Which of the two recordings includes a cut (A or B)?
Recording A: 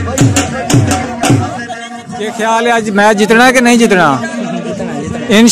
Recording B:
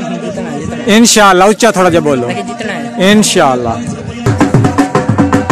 A